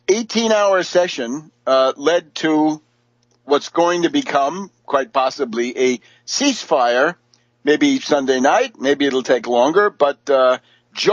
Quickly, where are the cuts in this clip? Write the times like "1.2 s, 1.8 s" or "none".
none